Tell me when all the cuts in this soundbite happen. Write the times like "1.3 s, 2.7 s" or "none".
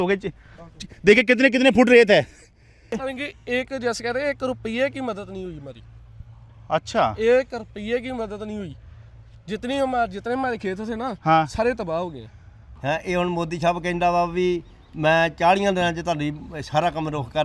3.0 s, 12.7 s